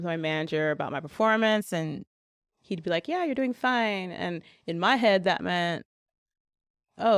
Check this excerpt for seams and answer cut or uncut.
uncut